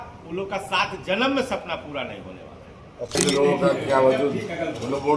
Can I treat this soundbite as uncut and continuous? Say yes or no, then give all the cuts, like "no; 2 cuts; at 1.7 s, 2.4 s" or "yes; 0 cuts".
no; 1 cut; at 3.2 s